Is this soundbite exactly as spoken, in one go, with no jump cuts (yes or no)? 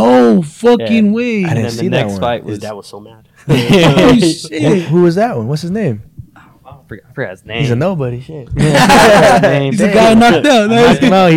yes